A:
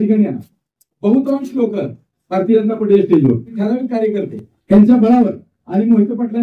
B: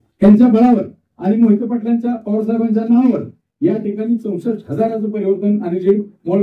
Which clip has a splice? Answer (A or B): A